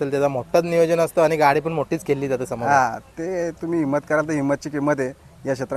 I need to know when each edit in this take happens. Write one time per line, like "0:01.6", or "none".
none